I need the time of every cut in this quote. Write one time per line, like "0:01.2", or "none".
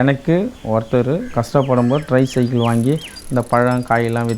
0:01.3